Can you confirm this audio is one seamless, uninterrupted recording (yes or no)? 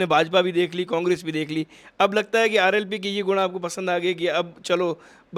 yes